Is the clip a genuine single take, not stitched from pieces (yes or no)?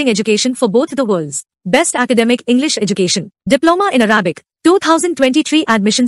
yes